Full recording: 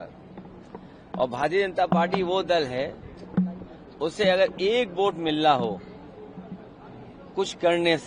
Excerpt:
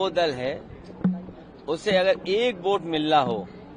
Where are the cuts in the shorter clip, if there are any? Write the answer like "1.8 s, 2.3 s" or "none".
none